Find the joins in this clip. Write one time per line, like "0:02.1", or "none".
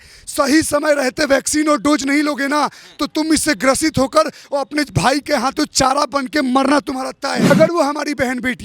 0:07.5

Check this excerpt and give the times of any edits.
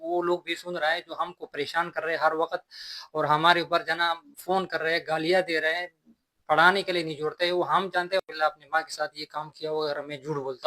0:08.2

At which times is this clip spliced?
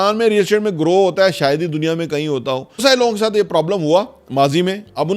0:02.8

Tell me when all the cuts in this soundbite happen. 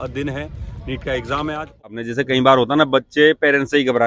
0:02.0

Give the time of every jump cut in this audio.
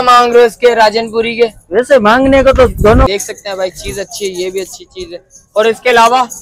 0:03.1

